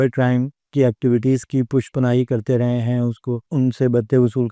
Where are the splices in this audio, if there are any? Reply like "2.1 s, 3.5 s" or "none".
none